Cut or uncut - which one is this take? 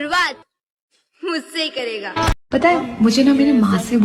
uncut